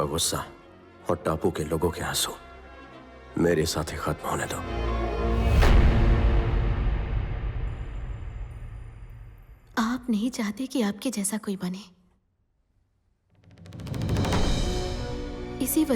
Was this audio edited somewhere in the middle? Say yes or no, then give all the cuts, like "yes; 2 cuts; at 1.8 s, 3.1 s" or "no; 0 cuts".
yes; 1 cut; at 4.8 s